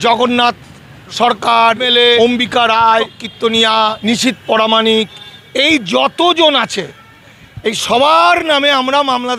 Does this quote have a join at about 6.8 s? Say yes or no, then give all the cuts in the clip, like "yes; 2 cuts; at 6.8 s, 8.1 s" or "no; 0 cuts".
no; 3 cuts; at 2.0 s, 3.2 s, 4.0 s